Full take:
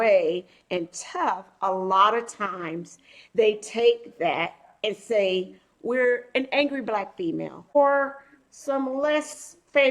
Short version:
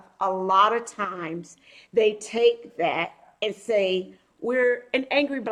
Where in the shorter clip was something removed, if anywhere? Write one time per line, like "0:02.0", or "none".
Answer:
none